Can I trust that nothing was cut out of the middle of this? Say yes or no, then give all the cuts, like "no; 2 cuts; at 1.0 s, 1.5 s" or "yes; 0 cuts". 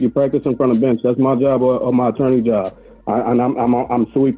yes; 0 cuts